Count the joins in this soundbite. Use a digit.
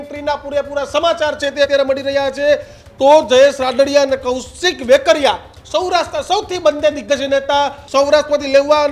2